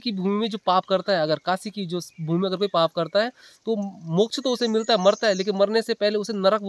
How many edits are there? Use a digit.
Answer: 0